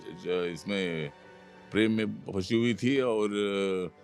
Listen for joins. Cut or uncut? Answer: uncut